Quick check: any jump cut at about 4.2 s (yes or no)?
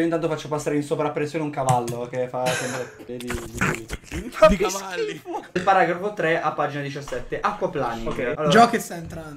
no